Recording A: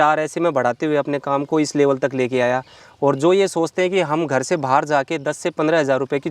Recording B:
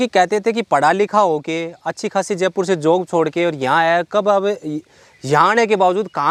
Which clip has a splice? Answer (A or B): A